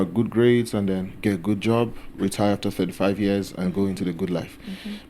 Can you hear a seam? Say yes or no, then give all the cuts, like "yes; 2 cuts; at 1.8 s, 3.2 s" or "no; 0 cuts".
no; 0 cuts